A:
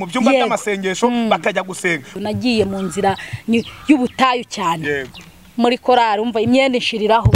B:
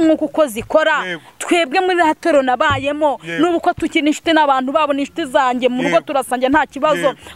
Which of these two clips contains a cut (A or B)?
A